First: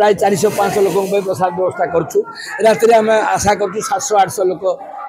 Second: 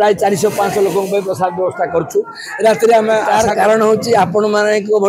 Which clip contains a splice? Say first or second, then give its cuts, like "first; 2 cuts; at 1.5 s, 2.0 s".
second; 1 cut; at 3.3 s